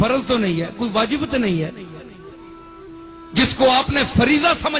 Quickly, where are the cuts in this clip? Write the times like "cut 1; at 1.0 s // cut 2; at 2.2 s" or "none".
none

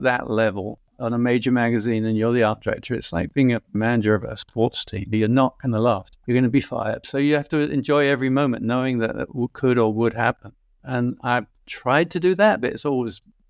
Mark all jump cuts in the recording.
none

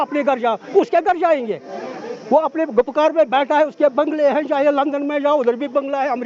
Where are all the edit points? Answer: none

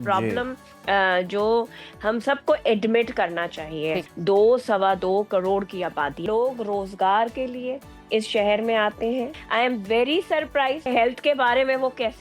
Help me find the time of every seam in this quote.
cut 1; at 4.0 s // cut 2; at 6.2 s // cut 3; at 9.4 s // cut 4; at 10.9 s

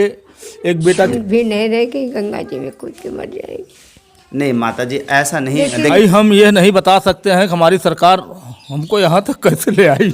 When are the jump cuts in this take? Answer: cut 1; at 1.1 s // cut 2; at 5.9 s

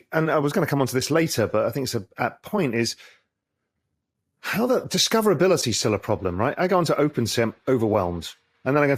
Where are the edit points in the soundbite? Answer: none

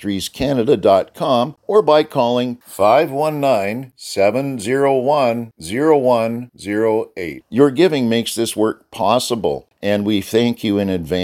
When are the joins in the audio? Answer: cut 1; at 1.6 s // cut 2; at 9.7 s

